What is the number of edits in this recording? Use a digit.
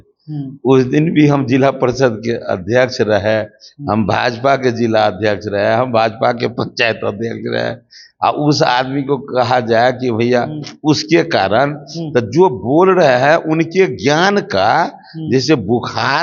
0